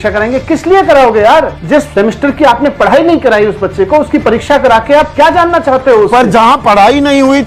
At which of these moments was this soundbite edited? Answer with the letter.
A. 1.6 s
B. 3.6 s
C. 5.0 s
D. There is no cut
A